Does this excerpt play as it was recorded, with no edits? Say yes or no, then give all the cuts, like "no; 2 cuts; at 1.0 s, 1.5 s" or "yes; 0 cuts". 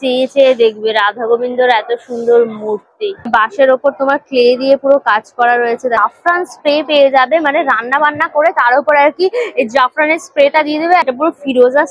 no; 3 cuts; at 3.0 s, 6.0 s, 11.1 s